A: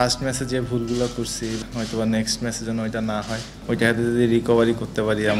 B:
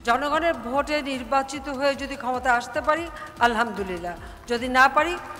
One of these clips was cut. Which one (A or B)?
A